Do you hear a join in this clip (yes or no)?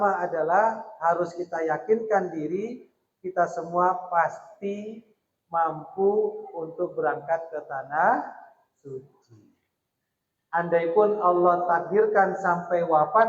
yes